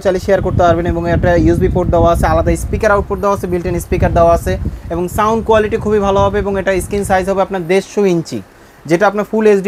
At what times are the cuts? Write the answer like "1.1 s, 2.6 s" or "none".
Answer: none